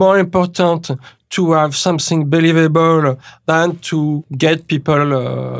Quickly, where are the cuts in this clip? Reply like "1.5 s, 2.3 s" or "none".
3.4 s, 4.3 s